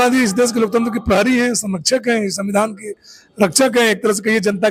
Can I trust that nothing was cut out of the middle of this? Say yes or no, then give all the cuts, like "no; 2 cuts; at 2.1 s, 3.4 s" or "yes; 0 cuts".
yes; 0 cuts